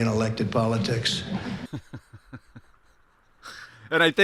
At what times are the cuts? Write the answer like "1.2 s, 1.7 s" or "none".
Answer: 1.6 s